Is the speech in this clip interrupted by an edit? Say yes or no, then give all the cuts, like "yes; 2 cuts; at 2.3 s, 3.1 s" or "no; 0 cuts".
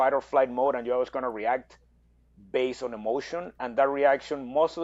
no; 0 cuts